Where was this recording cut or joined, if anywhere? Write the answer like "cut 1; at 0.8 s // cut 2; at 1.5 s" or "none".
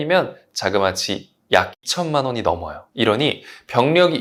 none